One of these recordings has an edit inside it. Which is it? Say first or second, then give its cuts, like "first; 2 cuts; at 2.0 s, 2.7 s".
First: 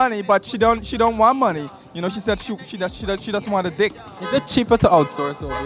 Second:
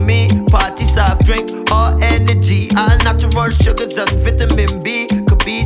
first; 1 cut; at 4.2 s